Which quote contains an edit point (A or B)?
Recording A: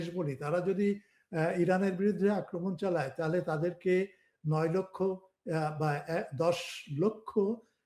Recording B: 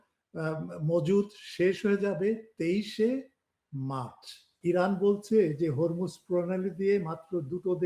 B